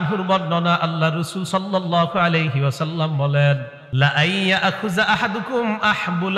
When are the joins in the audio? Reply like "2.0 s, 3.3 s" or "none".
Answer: 3.8 s